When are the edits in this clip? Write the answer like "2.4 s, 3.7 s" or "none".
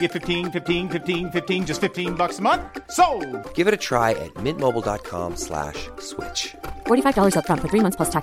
none